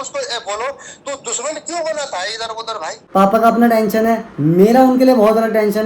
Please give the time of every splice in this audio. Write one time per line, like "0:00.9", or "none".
0:03.0